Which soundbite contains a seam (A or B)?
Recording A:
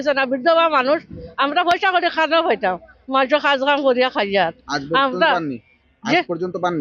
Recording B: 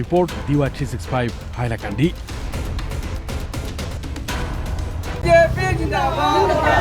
B